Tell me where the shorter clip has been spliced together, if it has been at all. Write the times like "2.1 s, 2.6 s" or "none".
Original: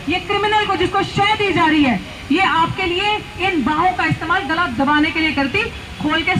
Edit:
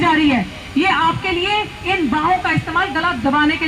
none